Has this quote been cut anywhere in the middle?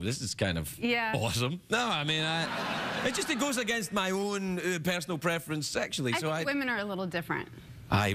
no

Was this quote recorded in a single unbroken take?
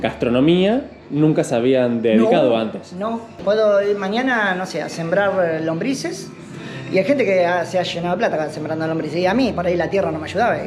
yes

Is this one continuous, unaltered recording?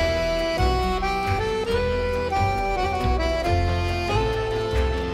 yes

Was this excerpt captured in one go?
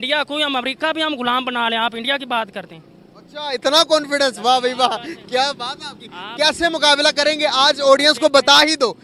yes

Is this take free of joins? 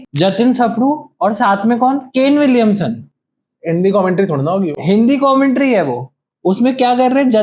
yes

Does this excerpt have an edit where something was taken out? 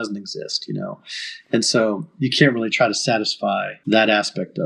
yes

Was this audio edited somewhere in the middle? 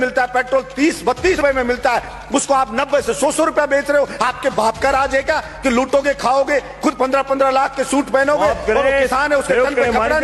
yes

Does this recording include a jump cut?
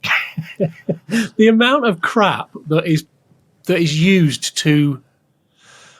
no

